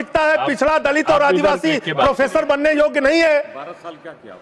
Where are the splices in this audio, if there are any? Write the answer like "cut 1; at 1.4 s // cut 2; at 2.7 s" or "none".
none